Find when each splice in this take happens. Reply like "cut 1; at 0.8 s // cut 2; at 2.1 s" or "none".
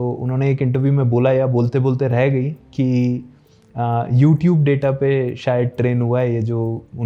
none